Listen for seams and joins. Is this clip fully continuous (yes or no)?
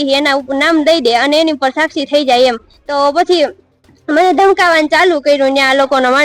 yes